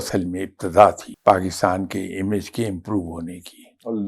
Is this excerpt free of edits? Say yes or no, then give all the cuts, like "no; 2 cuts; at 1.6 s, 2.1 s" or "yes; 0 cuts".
no; 1 cut; at 1.1 s